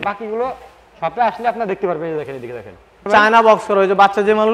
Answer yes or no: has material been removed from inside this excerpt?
yes